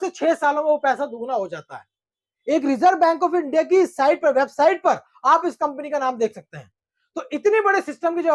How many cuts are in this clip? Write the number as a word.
zero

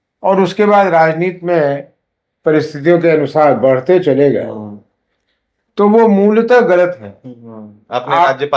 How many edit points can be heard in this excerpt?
zero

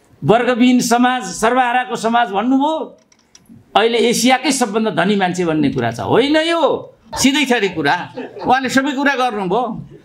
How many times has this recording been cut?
one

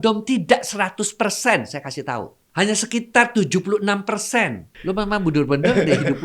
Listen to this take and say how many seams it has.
two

